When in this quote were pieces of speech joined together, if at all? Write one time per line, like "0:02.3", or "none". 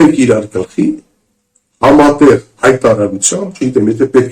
none